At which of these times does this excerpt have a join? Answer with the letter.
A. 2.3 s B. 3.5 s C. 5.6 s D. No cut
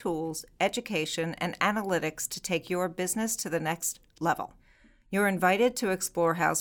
D